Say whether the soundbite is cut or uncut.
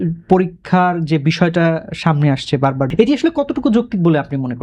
cut